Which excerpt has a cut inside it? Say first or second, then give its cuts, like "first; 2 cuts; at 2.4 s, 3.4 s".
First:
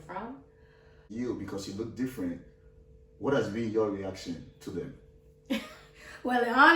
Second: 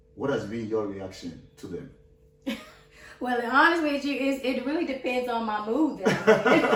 first; 1 cut; at 1.1 s